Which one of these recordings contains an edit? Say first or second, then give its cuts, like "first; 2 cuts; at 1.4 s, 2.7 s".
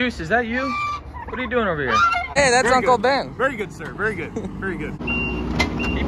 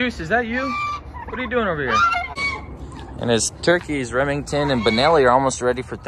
first; 2 cuts; at 2.4 s, 5.0 s